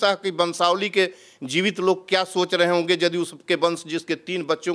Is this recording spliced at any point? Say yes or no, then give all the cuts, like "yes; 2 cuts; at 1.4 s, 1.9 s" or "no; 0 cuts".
no; 0 cuts